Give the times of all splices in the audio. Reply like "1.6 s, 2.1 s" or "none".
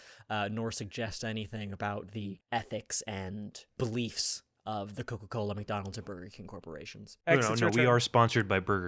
2.4 s, 3.7 s

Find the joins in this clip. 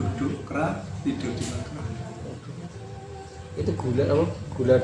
none

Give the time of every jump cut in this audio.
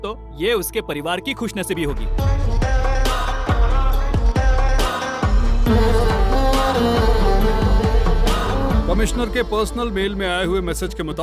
2.1 s, 8.6 s

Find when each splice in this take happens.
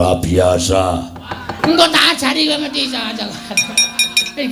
1.6 s

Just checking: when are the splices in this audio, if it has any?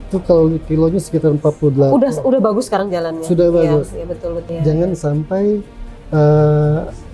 4.5 s

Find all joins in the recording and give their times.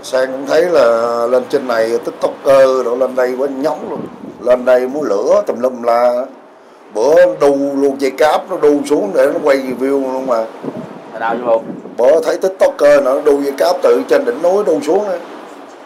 none

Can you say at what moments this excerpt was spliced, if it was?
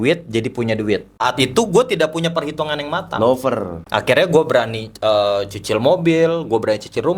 1.2 s, 3.8 s

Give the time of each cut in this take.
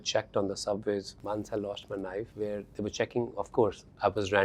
1.1 s, 2.3 s

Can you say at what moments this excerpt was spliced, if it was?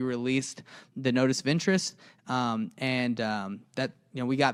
none

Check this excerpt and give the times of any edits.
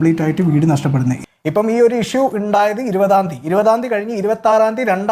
1.2 s

